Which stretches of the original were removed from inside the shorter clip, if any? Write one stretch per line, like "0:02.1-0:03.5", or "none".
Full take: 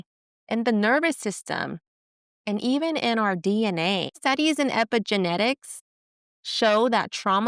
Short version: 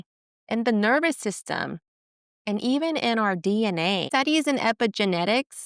0:04.0-0:04.2